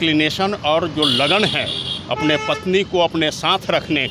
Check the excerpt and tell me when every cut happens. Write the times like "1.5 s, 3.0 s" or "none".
none